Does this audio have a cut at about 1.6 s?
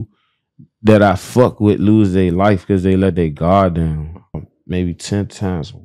no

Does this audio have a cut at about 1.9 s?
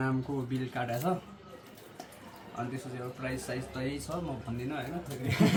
no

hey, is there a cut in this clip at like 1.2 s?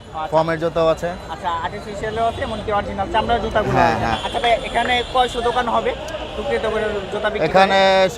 no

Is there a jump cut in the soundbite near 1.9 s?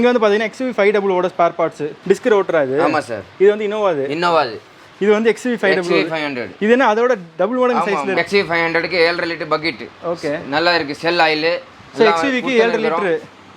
yes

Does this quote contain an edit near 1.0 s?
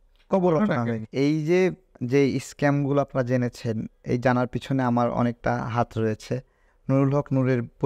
yes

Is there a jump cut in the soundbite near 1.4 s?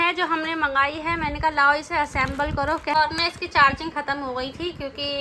no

